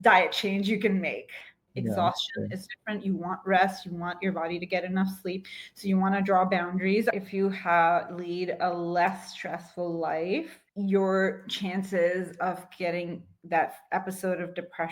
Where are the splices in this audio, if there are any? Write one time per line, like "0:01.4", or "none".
0:01.6
0:07.1
0:10.6